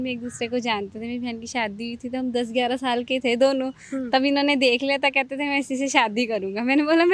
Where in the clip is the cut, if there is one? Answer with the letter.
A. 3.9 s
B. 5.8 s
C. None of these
C